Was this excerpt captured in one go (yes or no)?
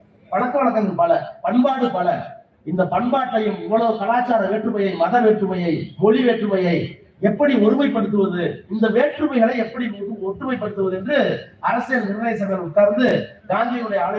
yes